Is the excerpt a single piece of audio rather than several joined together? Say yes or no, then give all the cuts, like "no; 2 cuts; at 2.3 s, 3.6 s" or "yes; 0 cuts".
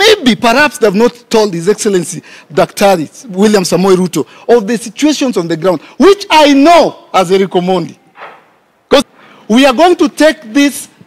no; 1 cut; at 9.0 s